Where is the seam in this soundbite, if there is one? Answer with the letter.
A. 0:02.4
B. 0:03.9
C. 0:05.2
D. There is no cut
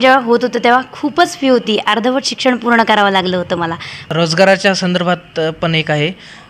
B